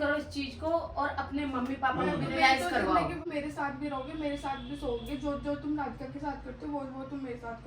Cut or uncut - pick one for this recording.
cut